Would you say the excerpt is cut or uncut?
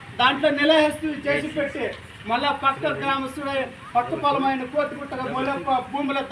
uncut